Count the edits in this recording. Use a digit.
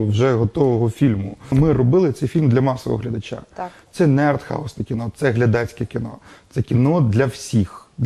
1